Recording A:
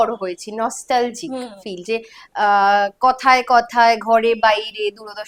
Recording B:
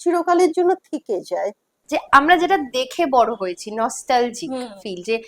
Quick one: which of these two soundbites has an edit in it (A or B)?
B